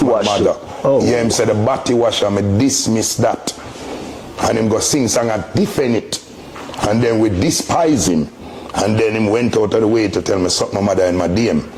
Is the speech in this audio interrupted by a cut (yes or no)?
no